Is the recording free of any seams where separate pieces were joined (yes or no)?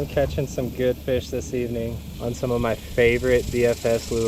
no